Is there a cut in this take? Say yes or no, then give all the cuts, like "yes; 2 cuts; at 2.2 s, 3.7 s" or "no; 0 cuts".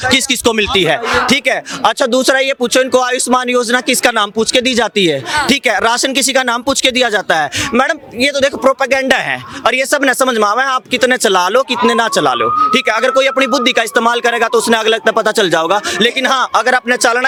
no; 0 cuts